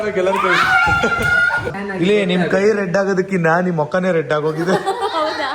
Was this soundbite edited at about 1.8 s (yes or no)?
yes